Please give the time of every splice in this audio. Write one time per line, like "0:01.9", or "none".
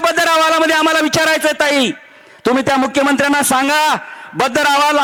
none